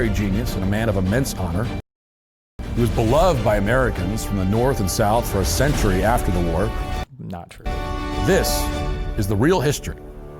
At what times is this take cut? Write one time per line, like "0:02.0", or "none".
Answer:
none